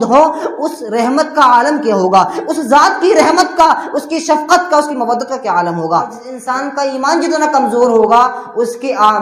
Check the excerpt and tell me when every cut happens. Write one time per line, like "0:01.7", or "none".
0:06.3